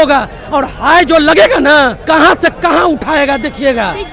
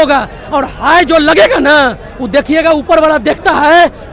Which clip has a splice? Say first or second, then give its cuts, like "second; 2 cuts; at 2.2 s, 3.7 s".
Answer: first; 1 cut; at 2.0 s